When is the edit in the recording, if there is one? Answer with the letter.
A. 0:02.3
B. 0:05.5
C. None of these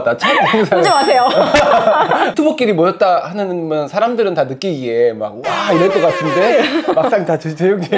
A